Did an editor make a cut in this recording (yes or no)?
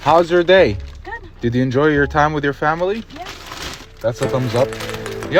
no